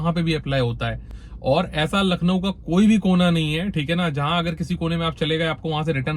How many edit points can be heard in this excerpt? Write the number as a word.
zero